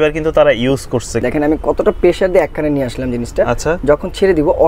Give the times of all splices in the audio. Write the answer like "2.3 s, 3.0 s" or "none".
1.1 s